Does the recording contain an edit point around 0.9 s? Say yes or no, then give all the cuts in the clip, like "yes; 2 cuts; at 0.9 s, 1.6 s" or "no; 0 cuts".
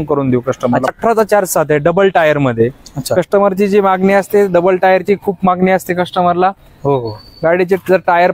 yes; 1 cut; at 0.9 s